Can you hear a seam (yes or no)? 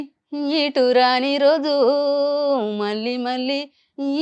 no